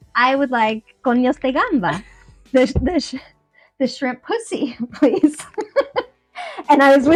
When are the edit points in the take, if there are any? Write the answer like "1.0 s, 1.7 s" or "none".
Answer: none